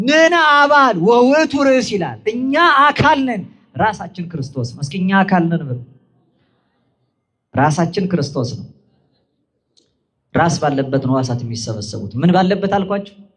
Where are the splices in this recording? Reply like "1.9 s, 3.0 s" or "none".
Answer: none